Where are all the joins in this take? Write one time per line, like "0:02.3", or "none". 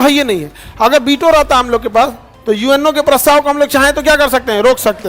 none